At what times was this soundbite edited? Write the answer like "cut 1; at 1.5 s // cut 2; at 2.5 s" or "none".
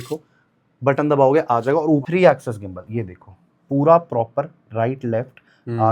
cut 1; at 2.0 s